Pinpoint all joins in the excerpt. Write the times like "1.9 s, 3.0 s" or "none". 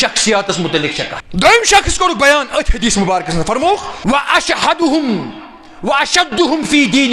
1.2 s, 3.9 s